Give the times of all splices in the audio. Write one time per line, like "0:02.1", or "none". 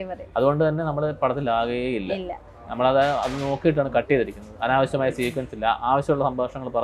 none